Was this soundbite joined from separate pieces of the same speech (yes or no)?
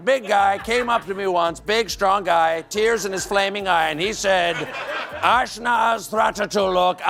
no